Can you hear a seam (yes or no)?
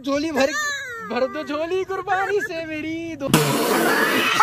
yes